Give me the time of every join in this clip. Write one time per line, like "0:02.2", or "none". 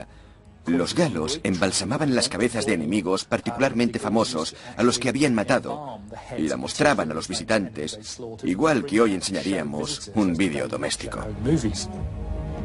0:02.6